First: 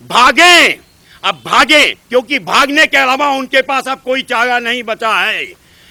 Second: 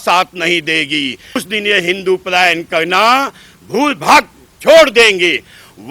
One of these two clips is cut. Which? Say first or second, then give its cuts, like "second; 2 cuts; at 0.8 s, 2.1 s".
second; 1 cut; at 1.4 s